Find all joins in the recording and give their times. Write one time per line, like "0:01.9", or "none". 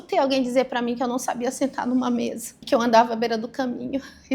0:02.5